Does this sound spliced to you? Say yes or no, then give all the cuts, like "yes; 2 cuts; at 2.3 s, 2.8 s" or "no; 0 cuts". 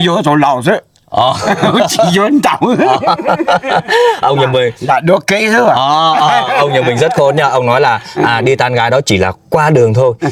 no; 0 cuts